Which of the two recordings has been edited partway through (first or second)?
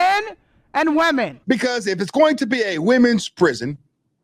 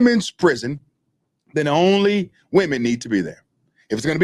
first